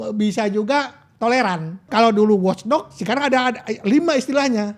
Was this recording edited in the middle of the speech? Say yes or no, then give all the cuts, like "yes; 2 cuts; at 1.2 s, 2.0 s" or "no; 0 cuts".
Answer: yes; 1 cut; at 1.9 s